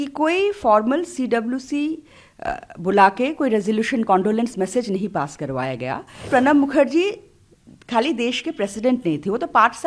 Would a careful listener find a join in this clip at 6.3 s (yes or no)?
yes